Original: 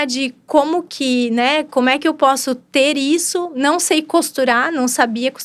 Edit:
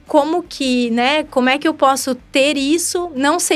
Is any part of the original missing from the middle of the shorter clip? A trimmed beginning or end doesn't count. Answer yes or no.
no